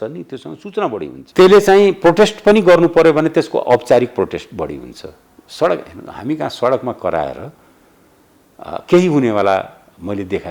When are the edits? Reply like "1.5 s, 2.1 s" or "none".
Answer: 1.2 s